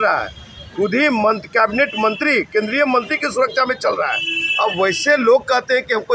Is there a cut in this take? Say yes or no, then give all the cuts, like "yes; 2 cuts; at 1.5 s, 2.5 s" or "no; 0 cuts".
no; 0 cuts